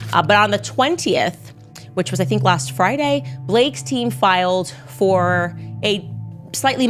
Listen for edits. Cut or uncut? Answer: uncut